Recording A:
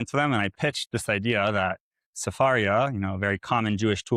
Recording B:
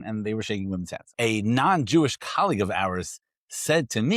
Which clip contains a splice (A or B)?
B